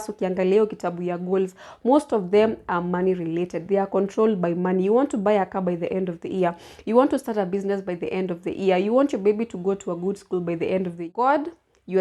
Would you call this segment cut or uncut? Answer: cut